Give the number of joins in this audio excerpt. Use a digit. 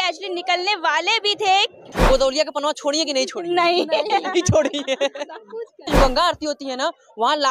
2